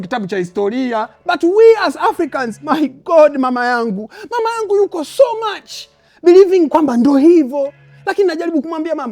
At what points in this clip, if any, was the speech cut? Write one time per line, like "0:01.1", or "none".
0:01.1